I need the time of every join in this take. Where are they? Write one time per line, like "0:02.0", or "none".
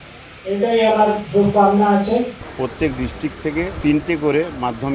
0:02.4
0:03.7